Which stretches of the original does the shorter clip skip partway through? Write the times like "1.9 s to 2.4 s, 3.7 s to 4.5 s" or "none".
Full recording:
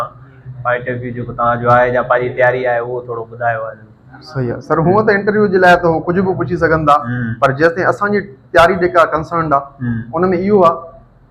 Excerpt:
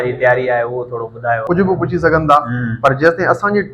3.6 s to 6.0 s